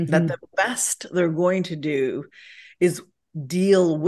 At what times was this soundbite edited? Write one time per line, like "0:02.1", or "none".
none